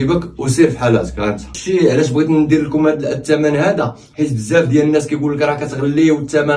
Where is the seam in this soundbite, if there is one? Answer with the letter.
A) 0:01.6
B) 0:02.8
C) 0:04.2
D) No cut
A